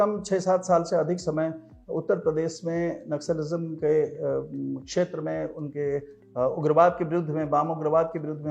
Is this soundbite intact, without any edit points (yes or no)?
yes